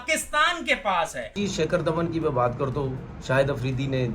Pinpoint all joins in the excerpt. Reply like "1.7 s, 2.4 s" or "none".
1.3 s